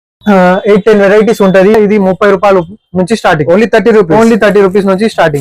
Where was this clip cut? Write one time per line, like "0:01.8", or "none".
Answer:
0:01.7